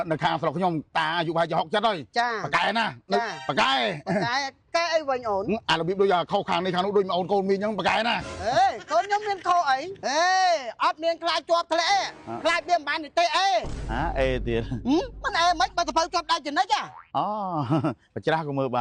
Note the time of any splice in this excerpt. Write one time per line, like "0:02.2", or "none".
0:00.9
0:03.4
0:09.9